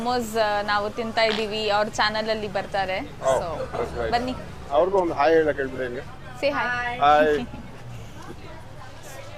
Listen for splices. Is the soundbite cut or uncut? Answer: uncut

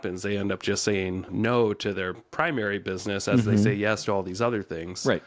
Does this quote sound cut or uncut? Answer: cut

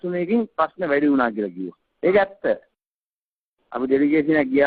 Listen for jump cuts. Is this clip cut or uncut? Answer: uncut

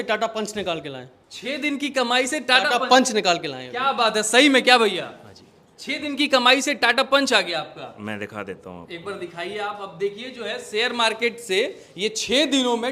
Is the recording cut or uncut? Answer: uncut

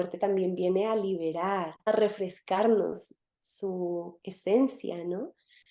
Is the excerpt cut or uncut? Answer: cut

